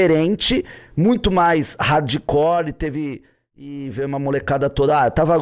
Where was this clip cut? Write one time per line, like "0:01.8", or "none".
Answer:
0:03.3